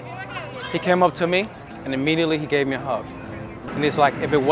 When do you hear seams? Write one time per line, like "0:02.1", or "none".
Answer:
0:03.6